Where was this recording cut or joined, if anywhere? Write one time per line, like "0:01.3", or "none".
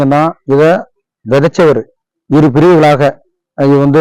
none